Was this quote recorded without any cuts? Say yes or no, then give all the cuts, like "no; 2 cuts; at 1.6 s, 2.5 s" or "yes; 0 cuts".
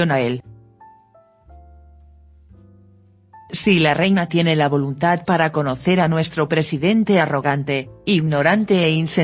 yes; 0 cuts